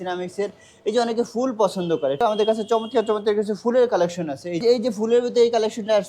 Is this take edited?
yes; 2 cuts; at 2.2 s, 4.6 s

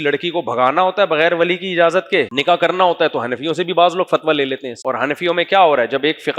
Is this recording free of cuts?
no; 2 cuts; at 2.3 s, 4.7 s

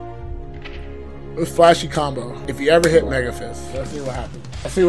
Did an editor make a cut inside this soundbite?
no; 0 cuts

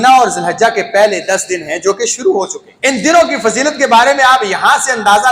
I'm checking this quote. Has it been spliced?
yes; 1 cut; at 2.6 s

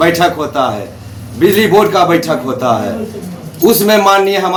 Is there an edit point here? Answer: no; 0 cuts

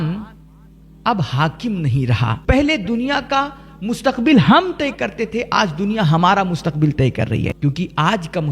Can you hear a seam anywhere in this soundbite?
yes; 2 cuts; at 2.4 s, 7.5 s

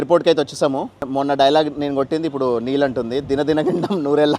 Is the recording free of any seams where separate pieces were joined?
no; 1 cut; at 1.1 s

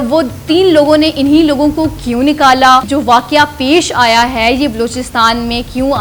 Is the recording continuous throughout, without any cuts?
no; 1 cut; at 2.9 s

